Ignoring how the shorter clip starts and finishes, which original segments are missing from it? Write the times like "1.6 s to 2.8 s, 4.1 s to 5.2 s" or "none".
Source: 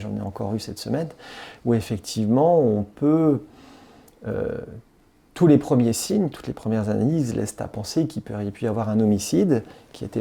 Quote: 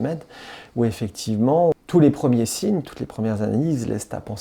2.6 s to 5.2 s